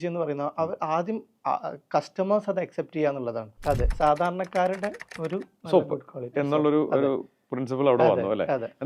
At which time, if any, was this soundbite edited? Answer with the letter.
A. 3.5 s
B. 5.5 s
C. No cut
A